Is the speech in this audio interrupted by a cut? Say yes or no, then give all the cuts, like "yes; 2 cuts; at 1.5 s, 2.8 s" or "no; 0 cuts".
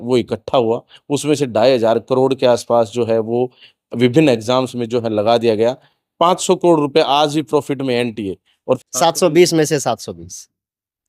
yes; 1 cut; at 8.8 s